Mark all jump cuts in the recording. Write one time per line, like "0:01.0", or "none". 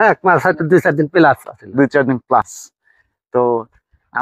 none

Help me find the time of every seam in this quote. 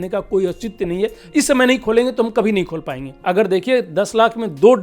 0:03.1

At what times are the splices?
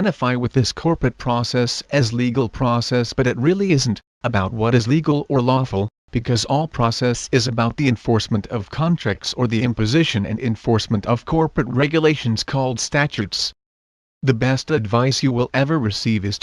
0:14.2

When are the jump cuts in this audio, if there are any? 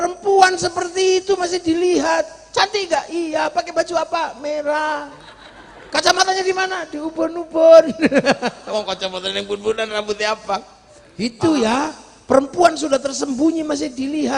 0:11.2

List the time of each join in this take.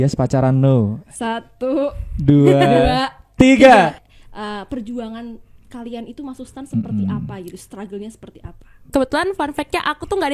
0:04.0
0:08.8

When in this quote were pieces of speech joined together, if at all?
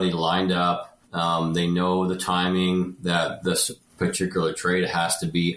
none

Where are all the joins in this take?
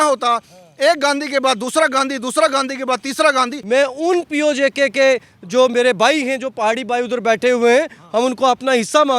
0:03.6

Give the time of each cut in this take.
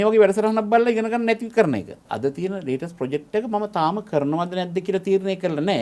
0:02.0

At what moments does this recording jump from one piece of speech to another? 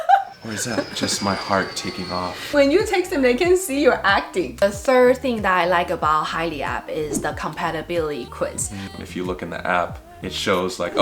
0:04.6
0:08.9

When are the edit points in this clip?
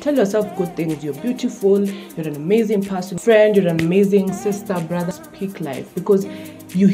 0:03.1
0:05.1

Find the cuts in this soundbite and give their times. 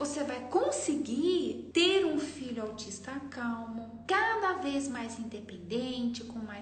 0:01.6
0:03.9

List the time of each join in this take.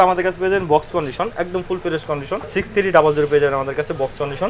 0:02.5

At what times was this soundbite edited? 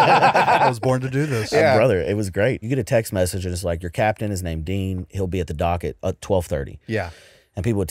0:02.6

